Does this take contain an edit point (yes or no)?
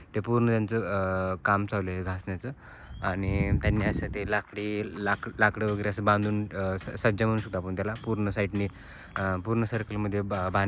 no